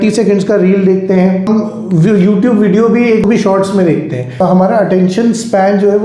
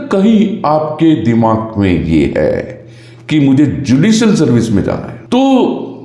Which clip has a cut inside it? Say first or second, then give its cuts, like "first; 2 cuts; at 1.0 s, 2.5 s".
first; 3 cuts; at 1.5 s, 3.2 s, 4.4 s